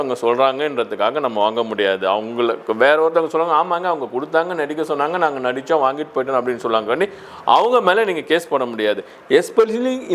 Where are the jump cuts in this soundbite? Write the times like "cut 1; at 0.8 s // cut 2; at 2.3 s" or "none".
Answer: none